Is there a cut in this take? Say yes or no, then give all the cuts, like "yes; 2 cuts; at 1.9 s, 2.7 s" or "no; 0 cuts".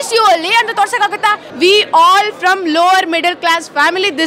yes; 1 cut; at 1.4 s